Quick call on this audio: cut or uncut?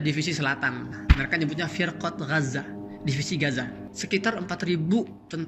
cut